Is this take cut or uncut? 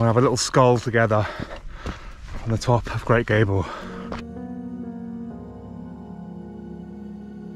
uncut